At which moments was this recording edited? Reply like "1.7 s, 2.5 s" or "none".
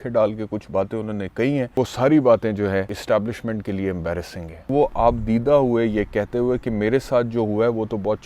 1.8 s, 3.0 s, 4.7 s